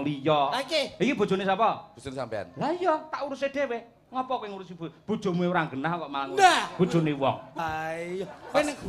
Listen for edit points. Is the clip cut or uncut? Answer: cut